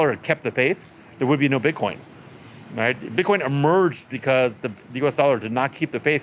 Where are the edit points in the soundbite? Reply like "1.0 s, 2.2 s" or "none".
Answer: none